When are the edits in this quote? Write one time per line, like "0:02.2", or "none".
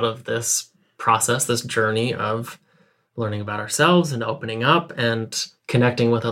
none